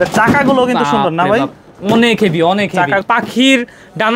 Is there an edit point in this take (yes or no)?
yes